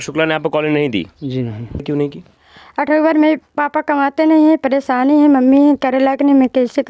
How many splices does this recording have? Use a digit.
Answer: 1